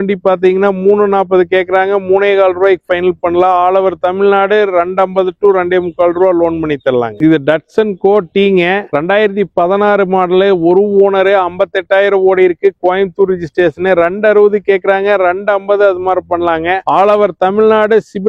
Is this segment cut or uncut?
uncut